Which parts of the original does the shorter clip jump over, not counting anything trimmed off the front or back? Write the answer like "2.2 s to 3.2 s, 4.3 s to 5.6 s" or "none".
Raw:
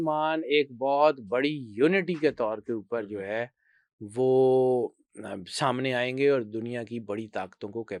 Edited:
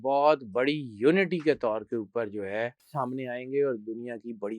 3.6 s to 5.5 s